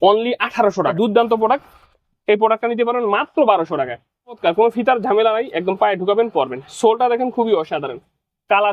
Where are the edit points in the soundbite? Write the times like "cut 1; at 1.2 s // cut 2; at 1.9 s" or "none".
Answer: cut 1; at 0.9 s // cut 2; at 4.4 s